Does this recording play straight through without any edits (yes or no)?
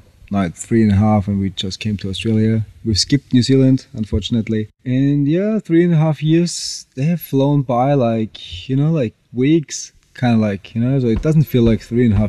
yes